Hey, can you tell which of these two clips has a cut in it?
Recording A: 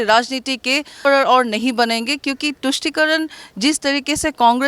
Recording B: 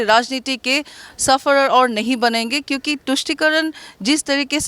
A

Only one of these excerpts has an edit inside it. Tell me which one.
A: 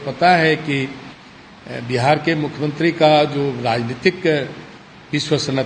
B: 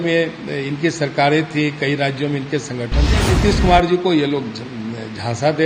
B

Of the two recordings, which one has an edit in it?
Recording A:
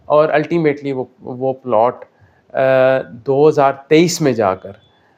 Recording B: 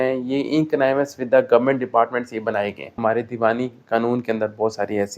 B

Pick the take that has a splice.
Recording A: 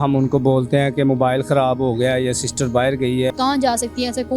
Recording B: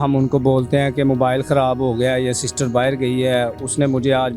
A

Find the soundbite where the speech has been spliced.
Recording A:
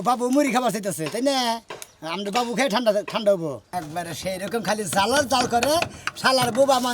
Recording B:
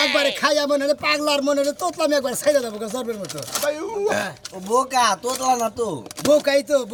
A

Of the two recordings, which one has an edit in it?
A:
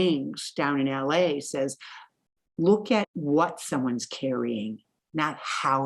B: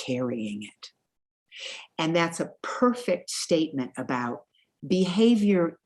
A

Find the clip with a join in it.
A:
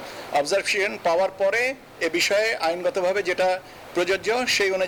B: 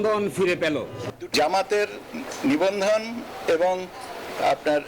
B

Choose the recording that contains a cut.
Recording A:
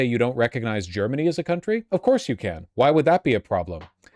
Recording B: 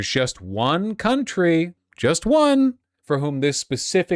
B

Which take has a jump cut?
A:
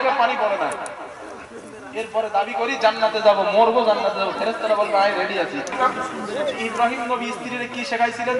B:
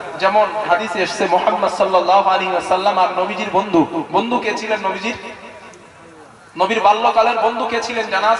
A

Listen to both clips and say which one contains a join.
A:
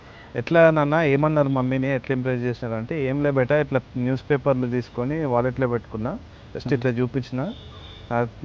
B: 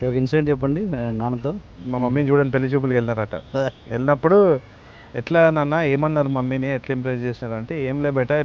B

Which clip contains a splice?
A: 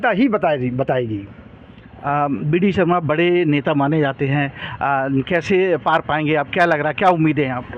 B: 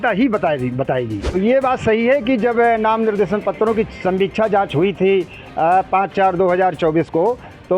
B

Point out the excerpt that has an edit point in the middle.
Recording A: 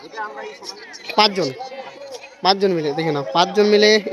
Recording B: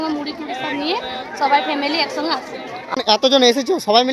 B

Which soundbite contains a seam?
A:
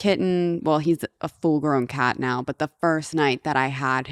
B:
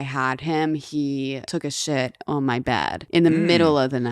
B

